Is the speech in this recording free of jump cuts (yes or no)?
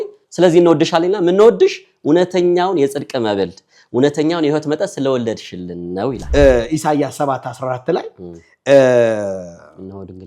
no